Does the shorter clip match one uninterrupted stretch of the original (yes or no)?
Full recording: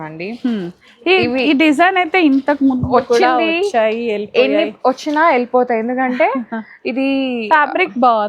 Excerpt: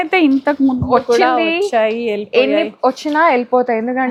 yes